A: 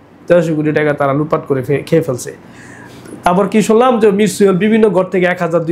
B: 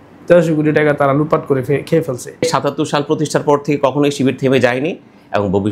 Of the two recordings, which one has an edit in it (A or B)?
B